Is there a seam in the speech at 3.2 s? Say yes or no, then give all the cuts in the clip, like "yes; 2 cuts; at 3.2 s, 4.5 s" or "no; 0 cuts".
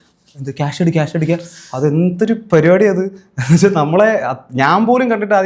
no; 0 cuts